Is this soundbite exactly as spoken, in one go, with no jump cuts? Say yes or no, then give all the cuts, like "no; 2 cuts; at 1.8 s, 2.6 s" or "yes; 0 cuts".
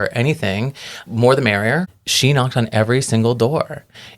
no; 2 cuts; at 0.9 s, 1.9 s